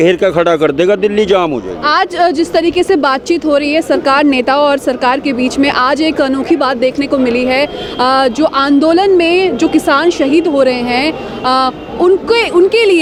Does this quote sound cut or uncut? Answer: uncut